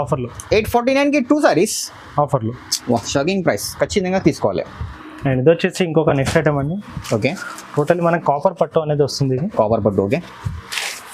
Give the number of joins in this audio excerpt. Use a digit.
0